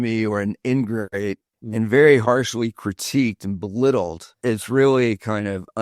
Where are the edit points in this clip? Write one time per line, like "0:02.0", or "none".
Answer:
0:04.2

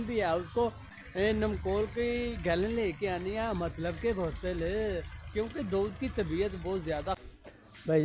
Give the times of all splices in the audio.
0:00.9
0:07.1

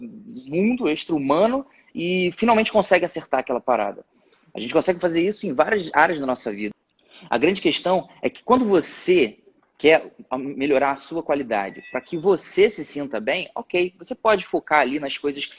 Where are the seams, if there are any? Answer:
0:06.7

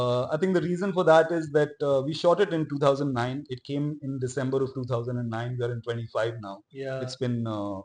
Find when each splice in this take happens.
none

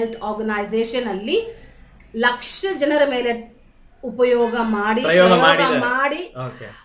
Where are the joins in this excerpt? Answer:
none

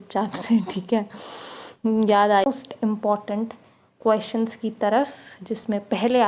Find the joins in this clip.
0:02.4

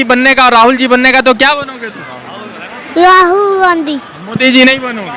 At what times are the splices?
none

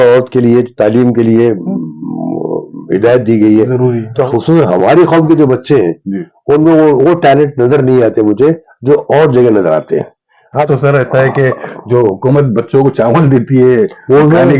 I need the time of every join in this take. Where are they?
0:04.2
0:10.7

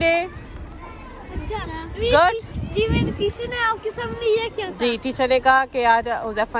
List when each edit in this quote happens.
none

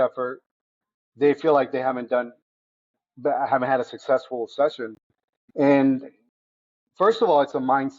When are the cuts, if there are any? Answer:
0:05.4

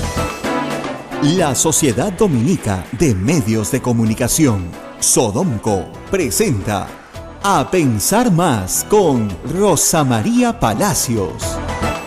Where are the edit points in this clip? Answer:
0:01.0

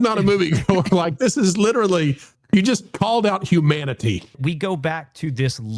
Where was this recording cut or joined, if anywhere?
0:04.4

